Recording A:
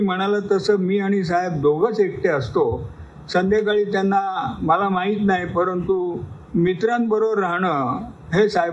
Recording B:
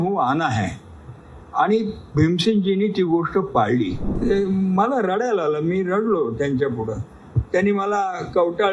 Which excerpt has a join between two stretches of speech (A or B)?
B